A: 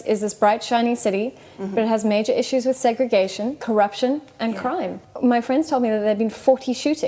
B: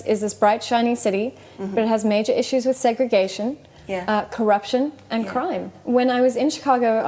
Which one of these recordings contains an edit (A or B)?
A